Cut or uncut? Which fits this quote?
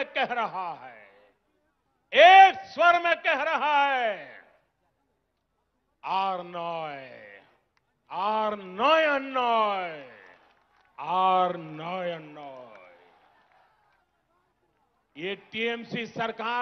uncut